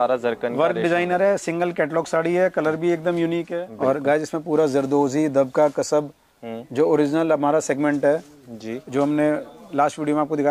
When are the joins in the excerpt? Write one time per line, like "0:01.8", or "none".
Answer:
0:03.5